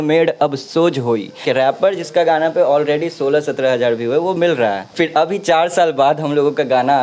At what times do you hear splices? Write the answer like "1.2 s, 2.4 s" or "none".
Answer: 1.3 s, 4.9 s

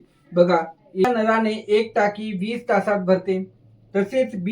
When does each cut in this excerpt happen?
1.0 s

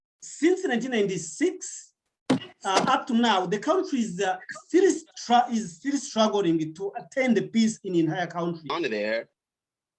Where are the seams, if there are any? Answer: 8.7 s

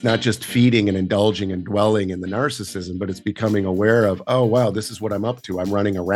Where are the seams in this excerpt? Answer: none

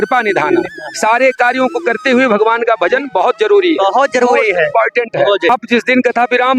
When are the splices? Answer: 5.5 s

